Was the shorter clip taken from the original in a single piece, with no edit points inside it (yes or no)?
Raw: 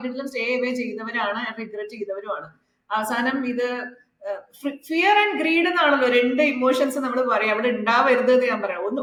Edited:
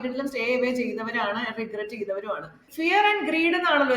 no